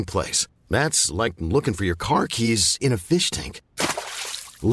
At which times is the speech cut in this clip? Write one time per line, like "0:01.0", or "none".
none